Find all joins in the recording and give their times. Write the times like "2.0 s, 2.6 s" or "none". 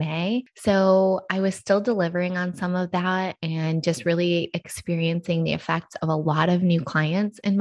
none